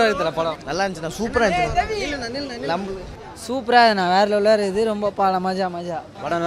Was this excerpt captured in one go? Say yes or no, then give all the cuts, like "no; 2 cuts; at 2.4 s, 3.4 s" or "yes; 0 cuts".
yes; 0 cuts